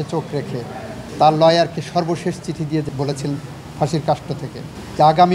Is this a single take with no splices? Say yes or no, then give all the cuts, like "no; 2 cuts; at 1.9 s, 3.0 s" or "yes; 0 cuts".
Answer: no; 2 cuts; at 1.0 s, 2.9 s